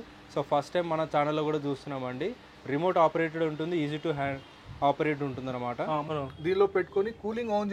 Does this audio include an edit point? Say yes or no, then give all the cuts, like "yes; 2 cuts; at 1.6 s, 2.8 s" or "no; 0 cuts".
yes; 1 cut; at 6.1 s